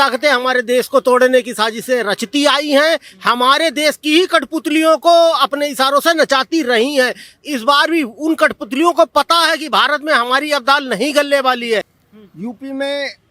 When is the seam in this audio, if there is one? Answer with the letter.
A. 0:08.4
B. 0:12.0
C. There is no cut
B